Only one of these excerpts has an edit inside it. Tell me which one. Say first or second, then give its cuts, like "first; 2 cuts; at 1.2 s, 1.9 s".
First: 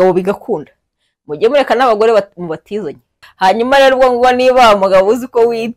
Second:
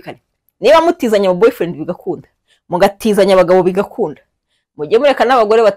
first; 1 cut; at 3.2 s